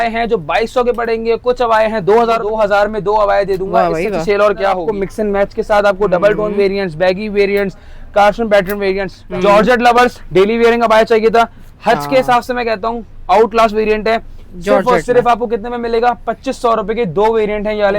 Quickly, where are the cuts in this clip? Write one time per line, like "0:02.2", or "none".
0:02.5
0:04.8
0:09.1